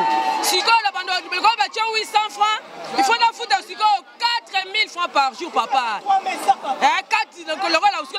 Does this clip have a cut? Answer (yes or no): no